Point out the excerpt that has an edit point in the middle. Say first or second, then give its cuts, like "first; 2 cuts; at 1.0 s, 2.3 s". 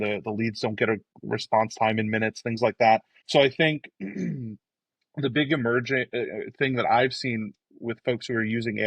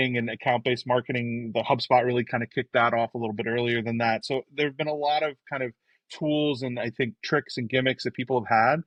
first; 2 cuts; at 1.1 s, 3.2 s